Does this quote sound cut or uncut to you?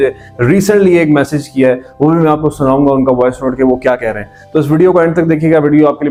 uncut